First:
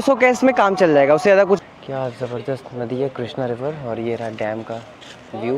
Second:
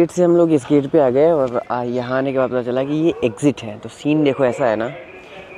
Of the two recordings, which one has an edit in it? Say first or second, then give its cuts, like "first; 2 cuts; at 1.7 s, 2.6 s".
first; 1 cut; at 1.6 s